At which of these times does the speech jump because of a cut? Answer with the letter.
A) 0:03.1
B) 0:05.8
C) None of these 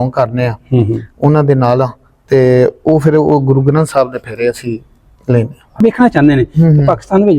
B